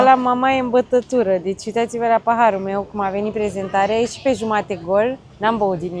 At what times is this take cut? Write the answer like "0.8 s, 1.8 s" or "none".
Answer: none

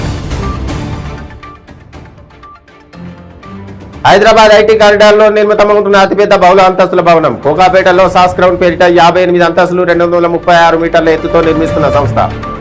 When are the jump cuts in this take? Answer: 1.0 s

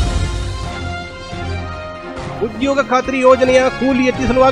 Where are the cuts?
2.4 s

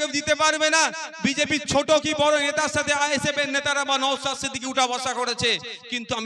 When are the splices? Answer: none

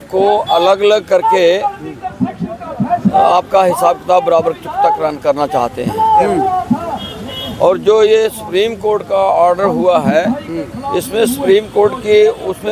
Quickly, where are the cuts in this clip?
none

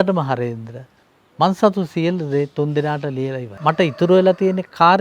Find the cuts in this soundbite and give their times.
3.5 s

